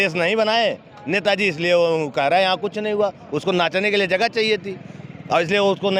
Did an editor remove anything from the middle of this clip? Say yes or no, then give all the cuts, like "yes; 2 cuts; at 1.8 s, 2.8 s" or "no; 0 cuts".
no; 0 cuts